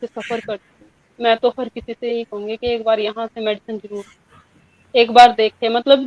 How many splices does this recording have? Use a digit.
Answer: 0